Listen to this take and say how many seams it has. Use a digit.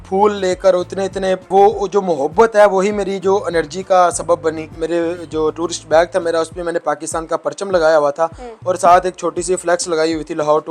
2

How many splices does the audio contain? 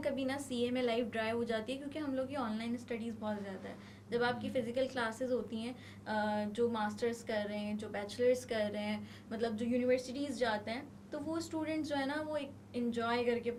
0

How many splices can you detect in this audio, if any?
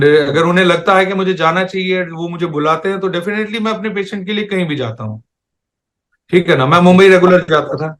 0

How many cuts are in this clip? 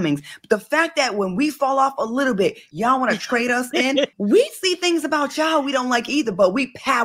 2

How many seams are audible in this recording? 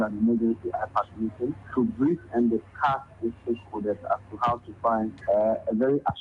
2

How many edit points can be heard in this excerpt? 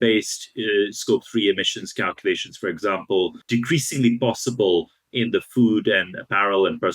1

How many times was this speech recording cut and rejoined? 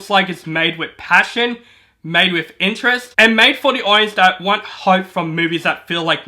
1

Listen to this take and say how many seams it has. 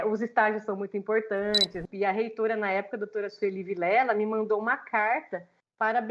1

